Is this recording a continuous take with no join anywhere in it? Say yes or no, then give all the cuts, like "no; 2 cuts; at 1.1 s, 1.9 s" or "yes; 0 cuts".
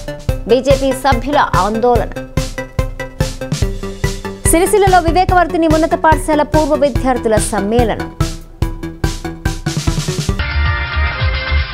no; 1 cut; at 10.8 s